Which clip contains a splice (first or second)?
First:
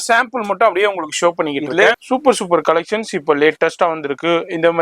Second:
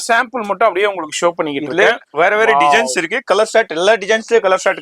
first